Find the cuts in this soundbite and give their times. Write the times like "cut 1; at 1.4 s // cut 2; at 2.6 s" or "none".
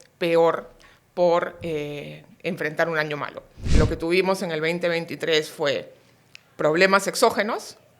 cut 1; at 3.8 s